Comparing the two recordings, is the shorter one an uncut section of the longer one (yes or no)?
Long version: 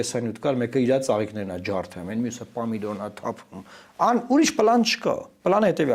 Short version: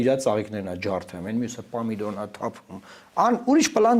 yes